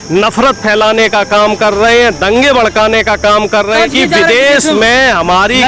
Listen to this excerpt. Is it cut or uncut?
cut